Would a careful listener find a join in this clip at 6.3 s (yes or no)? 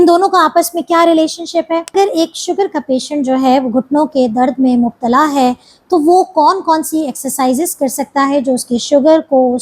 no